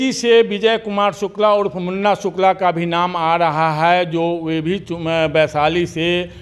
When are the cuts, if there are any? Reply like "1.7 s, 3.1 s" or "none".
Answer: none